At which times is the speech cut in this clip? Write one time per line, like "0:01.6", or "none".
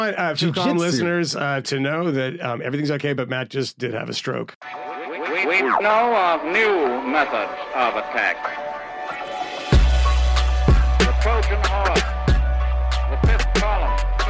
0:04.5